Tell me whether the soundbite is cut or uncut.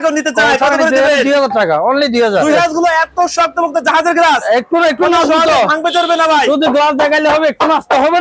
cut